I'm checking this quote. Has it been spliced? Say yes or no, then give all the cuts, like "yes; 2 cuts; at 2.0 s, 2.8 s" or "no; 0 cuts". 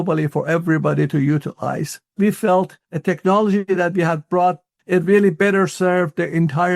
yes; 3 cuts; at 2.1 s, 2.8 s, 4.7 s